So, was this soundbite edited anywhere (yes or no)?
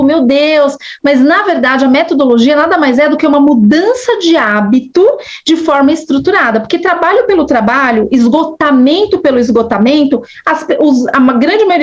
no